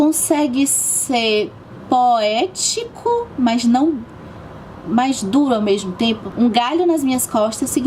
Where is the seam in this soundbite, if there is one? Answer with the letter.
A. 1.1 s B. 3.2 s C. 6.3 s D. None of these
C